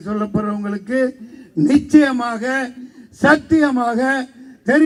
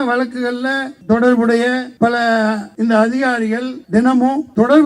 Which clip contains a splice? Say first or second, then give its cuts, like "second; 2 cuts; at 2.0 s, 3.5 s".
second; 3 cuts; at 0.9 s, 2.2 s, 3.9 s